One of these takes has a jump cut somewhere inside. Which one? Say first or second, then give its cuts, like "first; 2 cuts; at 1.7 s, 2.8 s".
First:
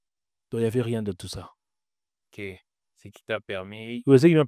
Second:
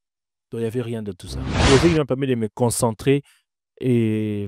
second; 1 cut; at 1.4 s